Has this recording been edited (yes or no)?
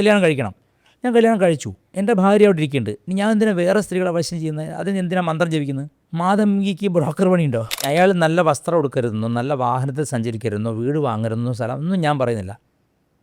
yes